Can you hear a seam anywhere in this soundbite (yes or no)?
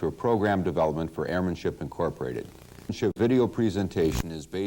yes